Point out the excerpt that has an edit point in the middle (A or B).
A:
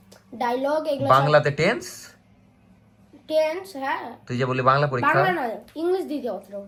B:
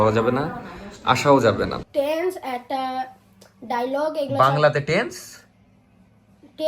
B